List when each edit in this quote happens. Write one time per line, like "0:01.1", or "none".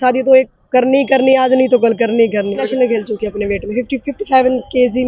0:02.7